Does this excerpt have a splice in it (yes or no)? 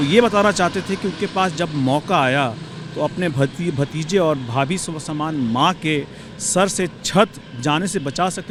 no